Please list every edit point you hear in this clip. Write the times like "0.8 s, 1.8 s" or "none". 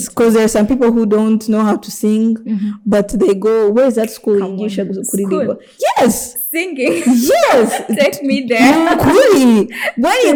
none

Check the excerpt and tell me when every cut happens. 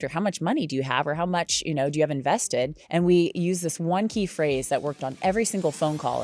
2.8 s

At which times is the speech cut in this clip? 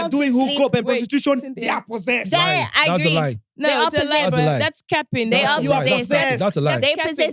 none

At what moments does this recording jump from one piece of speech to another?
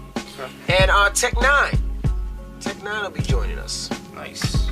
3.8 s

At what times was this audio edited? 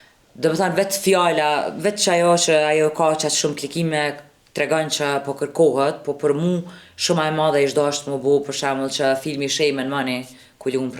none

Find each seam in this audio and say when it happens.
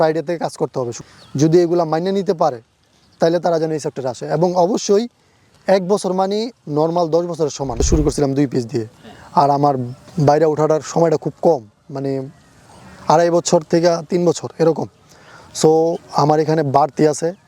0.9 s, 7.8 s

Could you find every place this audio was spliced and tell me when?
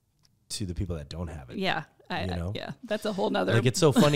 none

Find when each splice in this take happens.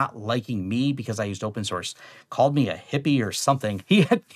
none

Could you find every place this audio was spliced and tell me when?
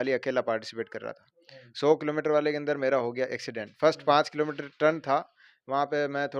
none

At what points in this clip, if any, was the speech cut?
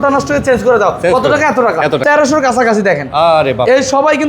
2.0 s

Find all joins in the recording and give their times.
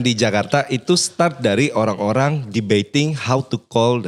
none

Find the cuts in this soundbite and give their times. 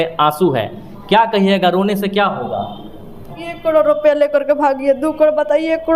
3.4 s

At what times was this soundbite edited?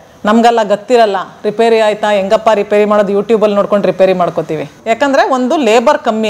4.9 s

